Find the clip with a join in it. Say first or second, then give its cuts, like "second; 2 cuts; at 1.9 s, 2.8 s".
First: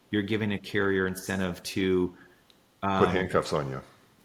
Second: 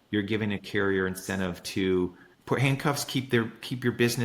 second; 1 cut; at 2.3 s